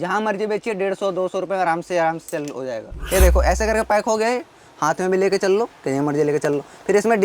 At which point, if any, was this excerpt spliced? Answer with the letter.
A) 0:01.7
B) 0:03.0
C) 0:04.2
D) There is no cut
B